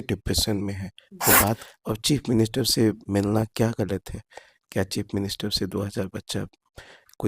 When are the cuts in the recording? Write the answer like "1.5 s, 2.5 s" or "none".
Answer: 1.6 s